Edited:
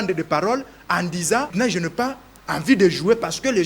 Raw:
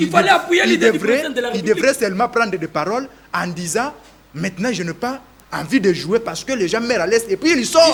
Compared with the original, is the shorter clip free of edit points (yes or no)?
no